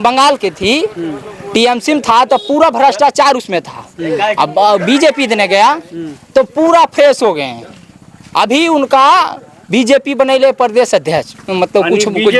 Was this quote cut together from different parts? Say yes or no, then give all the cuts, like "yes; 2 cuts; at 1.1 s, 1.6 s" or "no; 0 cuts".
no; 0 cuts